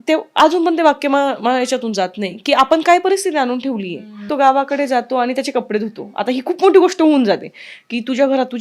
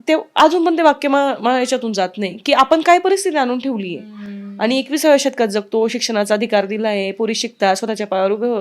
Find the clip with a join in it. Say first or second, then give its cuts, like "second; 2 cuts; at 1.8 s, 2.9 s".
first; 1 cut; at 4.3 s